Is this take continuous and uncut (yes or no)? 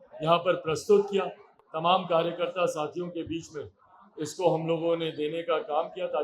yes